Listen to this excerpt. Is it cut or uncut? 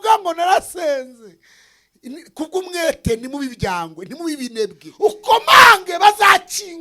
cut